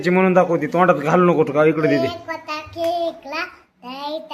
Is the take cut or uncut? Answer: uncut